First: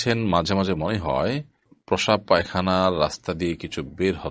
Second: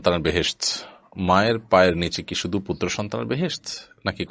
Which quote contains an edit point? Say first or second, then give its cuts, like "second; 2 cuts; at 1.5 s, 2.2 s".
first; 1 cut; at 1.7 s